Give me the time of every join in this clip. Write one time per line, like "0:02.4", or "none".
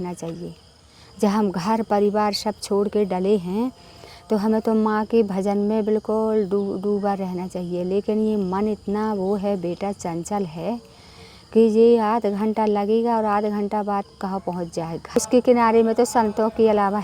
0:15.2